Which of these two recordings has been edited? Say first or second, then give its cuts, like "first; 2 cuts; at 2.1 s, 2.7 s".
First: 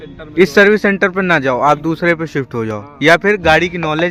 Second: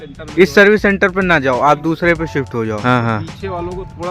second; 1 cut; at 2.8 s